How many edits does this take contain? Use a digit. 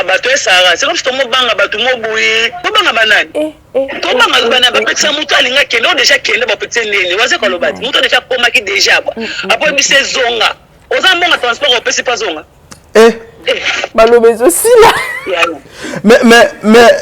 2